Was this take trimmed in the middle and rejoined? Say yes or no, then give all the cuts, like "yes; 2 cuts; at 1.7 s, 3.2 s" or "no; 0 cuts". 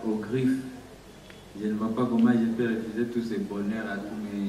no; 0 cuts